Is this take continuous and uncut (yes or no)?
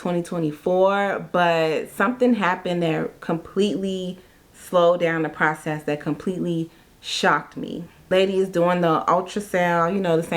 no